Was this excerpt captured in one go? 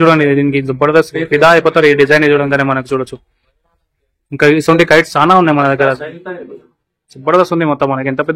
yes; 0 cuts

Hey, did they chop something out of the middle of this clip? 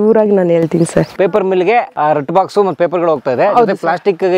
yes; 2 cuts; at 1.1 s, 1.9 s

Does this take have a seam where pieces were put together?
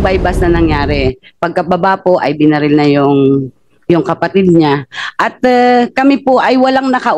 no; 0 cuts

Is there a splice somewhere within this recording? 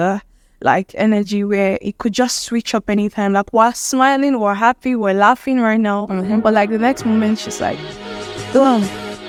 no; 0 cuts

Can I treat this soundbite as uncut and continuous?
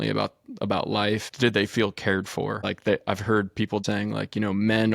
no; 3 cuts; at 1.3 s, 2.6 s, 3.8 s

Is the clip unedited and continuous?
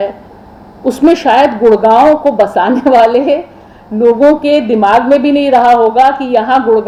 yes; 0 cuts

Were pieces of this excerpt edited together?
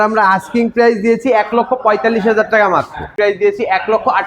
yes; 1 cut; at 3.0 s

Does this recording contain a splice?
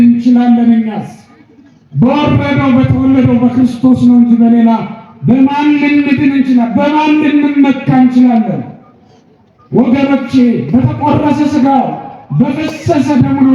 no; 0 cuts

